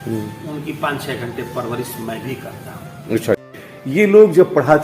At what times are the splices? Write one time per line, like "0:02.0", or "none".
0:03.4

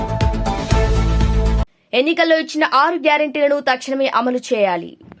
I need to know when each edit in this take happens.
0:01.7

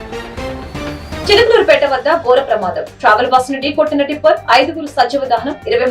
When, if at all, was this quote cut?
0:01.2

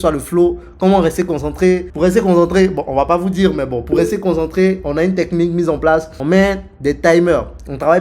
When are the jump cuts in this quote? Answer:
0:01.9
0:06.1

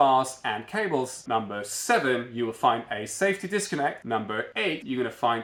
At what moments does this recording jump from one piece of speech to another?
none

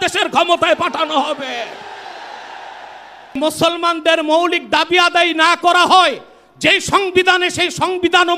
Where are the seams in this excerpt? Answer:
0:03.3

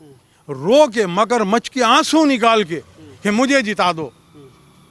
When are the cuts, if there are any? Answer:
none

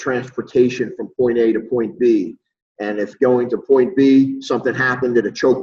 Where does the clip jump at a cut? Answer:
none

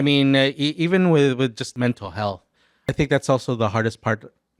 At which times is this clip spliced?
0:01.7
0:02.9

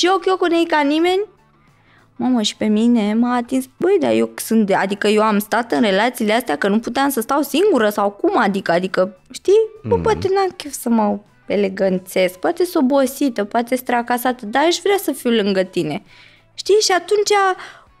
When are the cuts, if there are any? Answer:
0:03.7
0:09.2

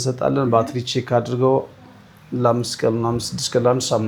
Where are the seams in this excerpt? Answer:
none

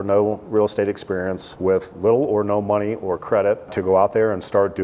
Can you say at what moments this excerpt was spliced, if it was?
0:01.4
0:03.8

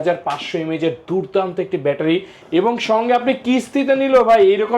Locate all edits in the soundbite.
0:02.3

